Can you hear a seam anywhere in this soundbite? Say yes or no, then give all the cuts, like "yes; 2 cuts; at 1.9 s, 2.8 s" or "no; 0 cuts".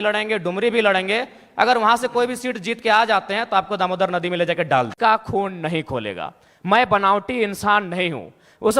yes; 1 cut; at 4.9 s